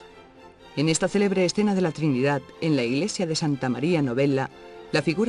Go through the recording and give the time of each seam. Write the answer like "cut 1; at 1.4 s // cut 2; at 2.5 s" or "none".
cut 1; at 4.0 s